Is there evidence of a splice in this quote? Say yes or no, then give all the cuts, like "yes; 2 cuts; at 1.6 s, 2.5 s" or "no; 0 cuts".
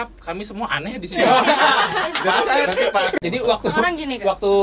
yes; 1 cut; at 3.2 s